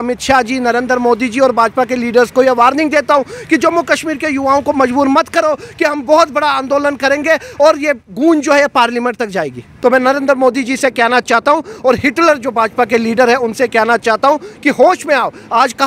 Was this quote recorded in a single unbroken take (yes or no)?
no